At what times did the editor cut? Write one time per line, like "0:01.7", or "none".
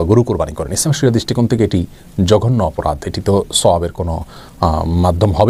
none